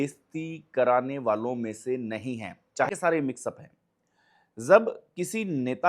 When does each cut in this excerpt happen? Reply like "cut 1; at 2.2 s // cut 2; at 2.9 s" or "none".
cut 1; at 2.9 s